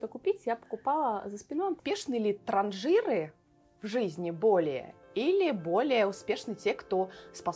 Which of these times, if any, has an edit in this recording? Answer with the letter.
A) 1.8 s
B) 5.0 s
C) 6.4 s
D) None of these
A